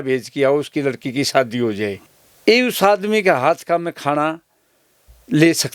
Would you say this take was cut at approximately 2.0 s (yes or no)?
yes